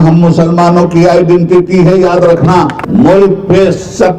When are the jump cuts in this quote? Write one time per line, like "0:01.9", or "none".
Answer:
0:02.8